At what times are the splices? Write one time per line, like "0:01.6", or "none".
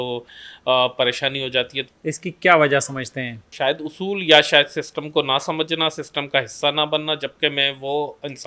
0:01.8
0:03.5